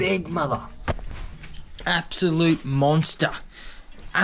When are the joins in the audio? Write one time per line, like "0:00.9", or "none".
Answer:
0:00.9

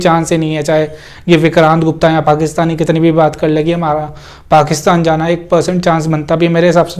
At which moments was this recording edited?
none

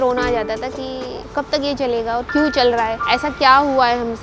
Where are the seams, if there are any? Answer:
0:01.2
0:03.0

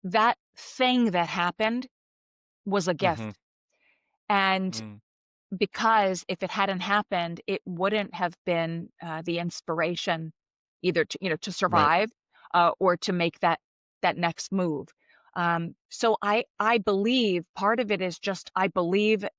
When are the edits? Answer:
none

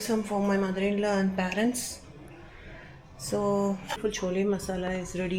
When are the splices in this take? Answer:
0:03.9

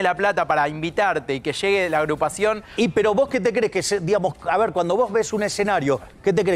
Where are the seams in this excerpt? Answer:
none

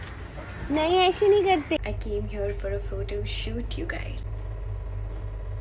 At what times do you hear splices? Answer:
0:01.8
0:04.2

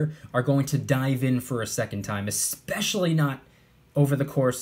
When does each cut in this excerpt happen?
none

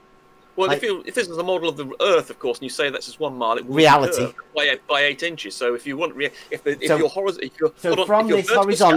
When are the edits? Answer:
none

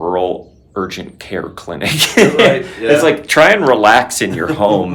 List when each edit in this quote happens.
none

